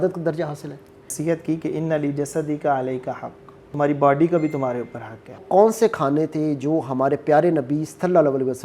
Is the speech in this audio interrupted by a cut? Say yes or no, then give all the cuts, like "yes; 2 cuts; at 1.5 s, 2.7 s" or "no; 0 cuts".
yes; 2 cuts; at 1.1 s, 5.4 s